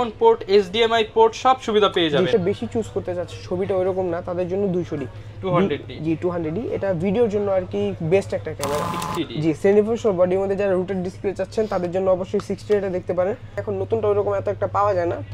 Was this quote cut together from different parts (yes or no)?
yes